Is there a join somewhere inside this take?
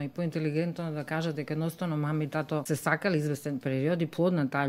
yes; 1 cut; at 2.6 s

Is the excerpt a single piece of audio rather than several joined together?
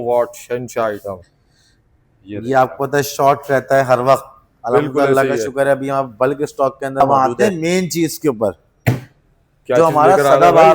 no; 1 cut; at 7.0 s

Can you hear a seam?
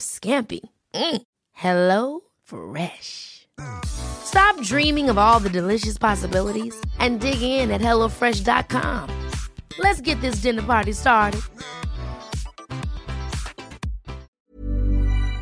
yes; 1 cut; at 14.3 s

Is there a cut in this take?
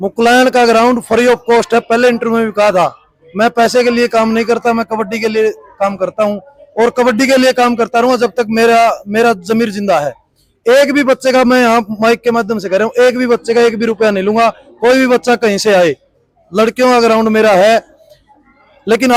no; 0 cuts

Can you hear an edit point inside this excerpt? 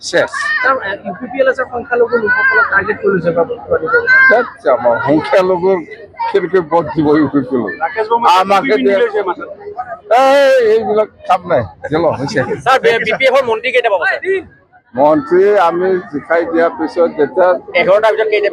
no; 0 cuts

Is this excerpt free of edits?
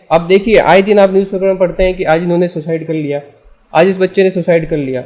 yes; 0 cuts

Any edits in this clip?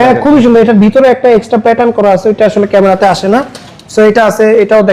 no; 0 cuts

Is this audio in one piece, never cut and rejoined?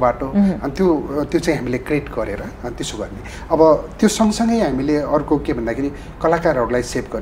yes; 0 cuts

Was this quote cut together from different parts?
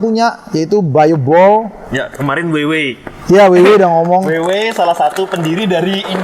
no; 0 cuts

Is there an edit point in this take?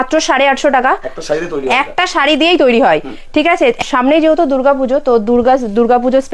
yes; 1 cut; at 3.9 s

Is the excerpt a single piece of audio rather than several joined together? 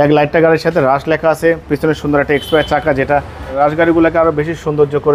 no; 1 cut; at 3.5 s

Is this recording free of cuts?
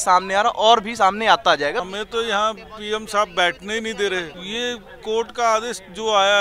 no; 2 cuts; at 1.9 s, 4.4 s

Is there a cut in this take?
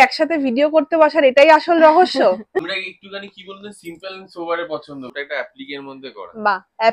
yes; 2 cuts; at 2.6 s, 5.1 s

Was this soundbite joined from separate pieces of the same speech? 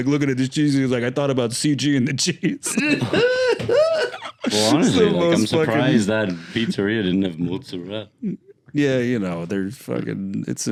no; 0 cuts

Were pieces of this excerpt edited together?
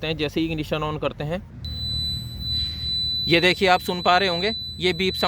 yes; 1 cut; at 1.5 s

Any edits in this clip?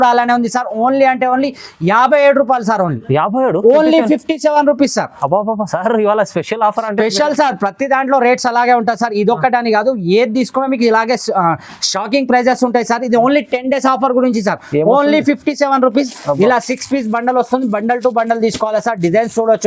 no; 0 cuts

